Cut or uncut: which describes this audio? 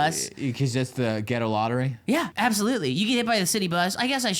cut